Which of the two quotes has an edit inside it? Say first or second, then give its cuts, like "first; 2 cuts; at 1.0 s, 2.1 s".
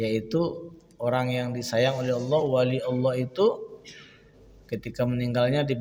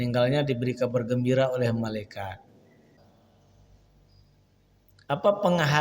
second; 1 cut; at 3.0 s